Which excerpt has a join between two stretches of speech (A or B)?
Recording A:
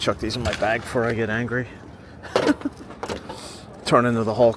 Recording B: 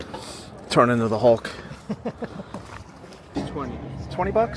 B